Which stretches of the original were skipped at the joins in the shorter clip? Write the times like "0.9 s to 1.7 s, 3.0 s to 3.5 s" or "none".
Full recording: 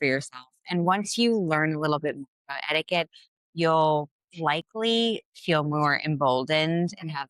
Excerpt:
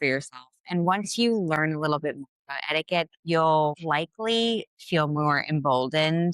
3.2 s to 3.5 s, 4.1 s to 4.4 s